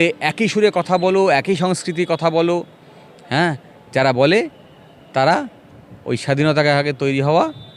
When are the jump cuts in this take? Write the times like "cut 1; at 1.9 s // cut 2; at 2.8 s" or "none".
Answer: none